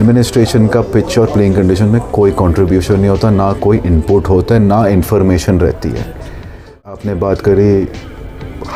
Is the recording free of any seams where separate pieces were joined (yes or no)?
no